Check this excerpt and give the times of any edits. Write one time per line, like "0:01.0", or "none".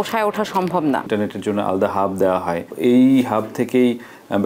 0:01.1
0:02.7